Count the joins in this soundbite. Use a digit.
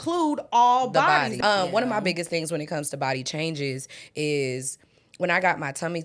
1